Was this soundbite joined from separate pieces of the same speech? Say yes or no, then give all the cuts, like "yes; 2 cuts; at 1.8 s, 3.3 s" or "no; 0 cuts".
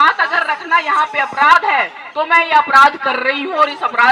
no; 0 cuts